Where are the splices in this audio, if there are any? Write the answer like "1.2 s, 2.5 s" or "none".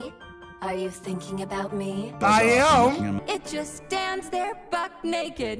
3.2 s